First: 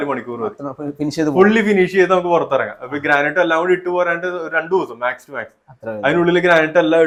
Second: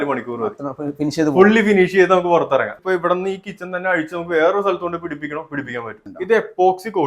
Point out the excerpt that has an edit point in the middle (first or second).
second